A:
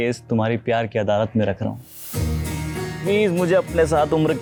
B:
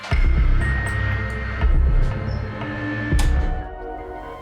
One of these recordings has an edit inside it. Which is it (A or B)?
B